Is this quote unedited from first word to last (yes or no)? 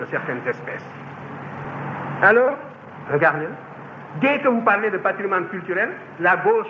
no